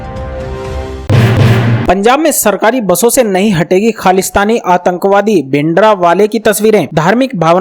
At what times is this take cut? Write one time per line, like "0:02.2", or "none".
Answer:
0:01.0